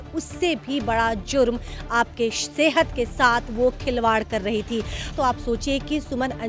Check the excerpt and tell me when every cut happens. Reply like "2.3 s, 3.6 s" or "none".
5.1 s